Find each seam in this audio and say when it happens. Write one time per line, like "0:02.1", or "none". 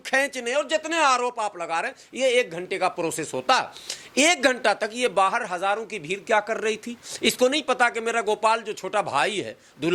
none